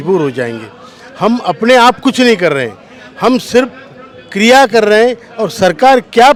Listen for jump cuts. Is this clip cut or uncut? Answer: uncut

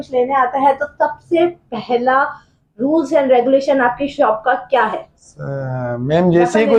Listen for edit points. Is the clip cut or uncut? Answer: uncut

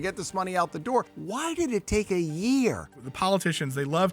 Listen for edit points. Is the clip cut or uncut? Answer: cut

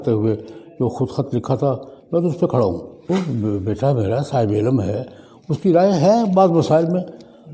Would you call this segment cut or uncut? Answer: cut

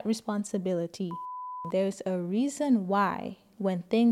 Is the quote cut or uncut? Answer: cut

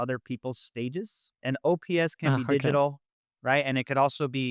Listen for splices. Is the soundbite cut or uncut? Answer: uncut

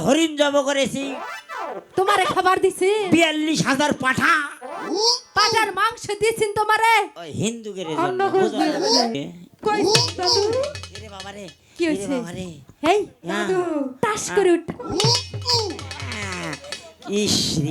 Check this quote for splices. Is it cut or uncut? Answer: cut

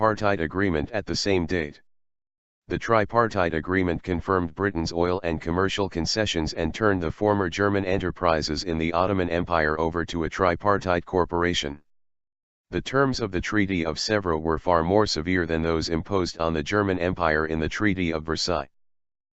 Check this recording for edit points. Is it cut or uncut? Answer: cut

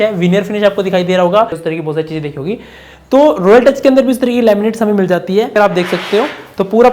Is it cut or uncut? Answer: cut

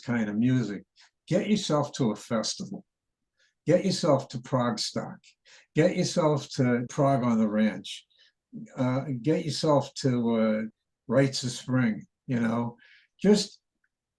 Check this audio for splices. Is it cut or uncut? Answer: cut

